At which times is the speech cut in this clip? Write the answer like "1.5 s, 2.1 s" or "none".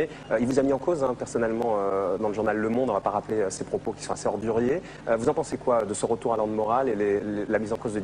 none